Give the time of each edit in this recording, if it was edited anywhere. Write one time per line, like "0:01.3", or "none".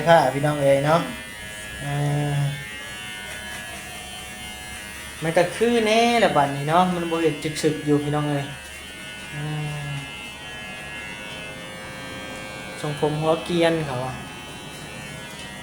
none